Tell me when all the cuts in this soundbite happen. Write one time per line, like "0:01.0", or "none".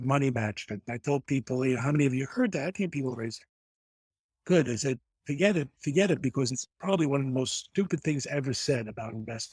none